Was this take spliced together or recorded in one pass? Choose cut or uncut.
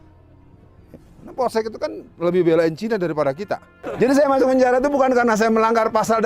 cut